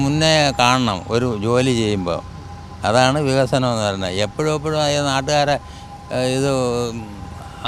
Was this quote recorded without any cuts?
yes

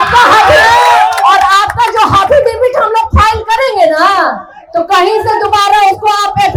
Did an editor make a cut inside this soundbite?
no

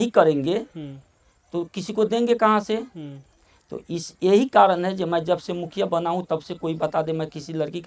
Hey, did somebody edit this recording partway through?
no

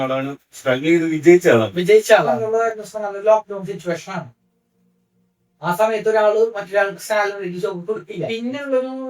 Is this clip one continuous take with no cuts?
no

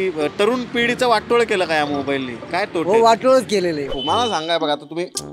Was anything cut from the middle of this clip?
yes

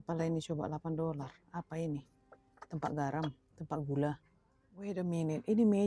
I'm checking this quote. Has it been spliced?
yes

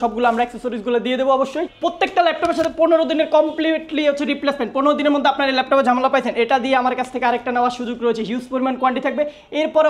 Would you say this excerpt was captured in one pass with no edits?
no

